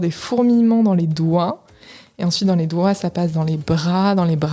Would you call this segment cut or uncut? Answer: uncut